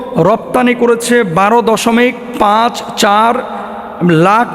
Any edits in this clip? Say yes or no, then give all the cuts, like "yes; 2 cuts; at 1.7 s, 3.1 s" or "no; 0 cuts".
no; 0 cuts